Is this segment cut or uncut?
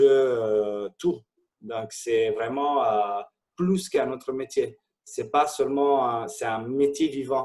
uncut